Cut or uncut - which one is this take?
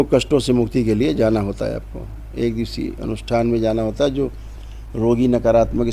uncut